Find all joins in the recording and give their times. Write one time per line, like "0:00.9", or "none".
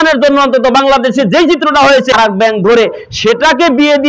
0:02.1